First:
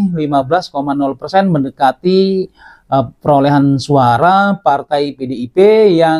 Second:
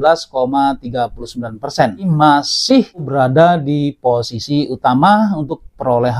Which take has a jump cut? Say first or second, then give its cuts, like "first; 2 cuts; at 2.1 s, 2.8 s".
second; 2 cuts; at 2.1 s, 3.1 s